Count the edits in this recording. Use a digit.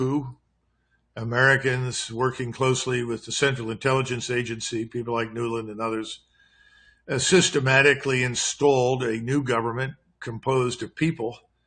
0